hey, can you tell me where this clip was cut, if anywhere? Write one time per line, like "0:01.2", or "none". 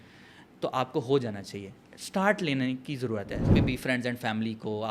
0:03.4